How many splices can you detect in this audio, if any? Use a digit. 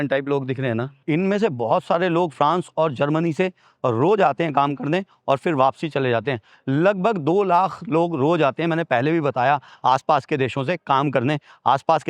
0